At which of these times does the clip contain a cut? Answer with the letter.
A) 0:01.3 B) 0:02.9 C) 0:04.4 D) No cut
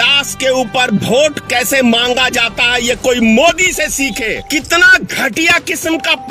C